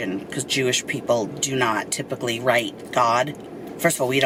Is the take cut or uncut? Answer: uncut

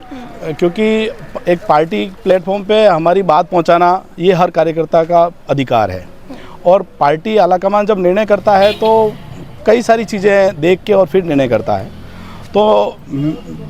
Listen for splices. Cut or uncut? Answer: uncut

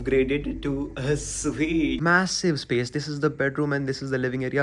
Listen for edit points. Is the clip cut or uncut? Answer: cut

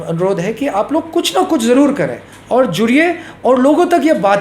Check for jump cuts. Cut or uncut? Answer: uncut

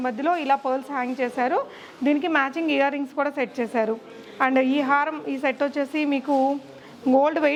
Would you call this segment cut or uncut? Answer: uncut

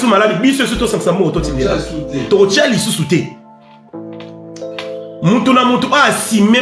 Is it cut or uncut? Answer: cut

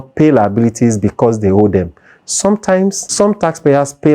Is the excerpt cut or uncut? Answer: cut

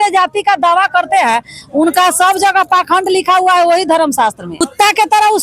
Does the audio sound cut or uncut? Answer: cut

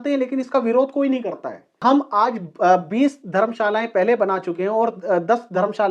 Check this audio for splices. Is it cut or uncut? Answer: cut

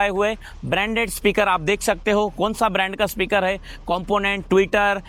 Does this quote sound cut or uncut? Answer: uncut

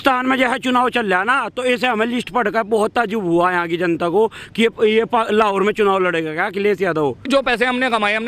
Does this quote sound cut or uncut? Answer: cut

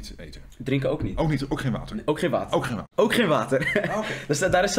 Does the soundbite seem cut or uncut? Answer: uncut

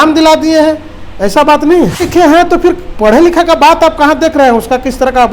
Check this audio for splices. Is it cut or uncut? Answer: cut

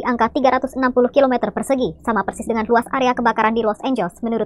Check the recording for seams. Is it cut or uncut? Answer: uncut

